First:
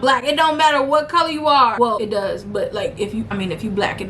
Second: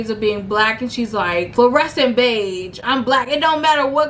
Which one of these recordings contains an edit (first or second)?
first